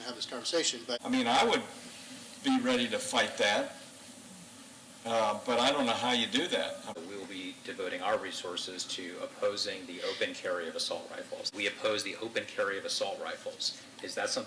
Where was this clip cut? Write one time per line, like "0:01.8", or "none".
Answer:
0:00.9
0:06.9
0:11.5